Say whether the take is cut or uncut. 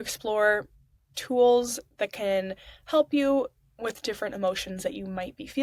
uncut